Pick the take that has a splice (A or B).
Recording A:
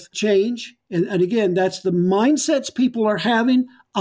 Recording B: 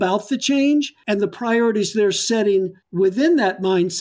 B